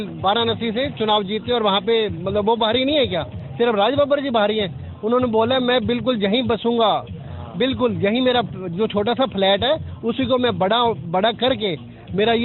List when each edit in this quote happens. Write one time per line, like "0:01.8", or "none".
none